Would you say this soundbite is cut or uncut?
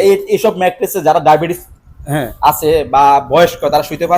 uncut